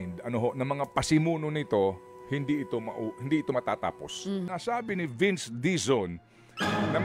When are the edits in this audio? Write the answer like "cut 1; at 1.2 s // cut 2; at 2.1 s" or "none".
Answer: cut 1; at 4.5 s